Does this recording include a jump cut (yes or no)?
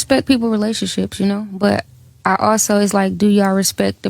no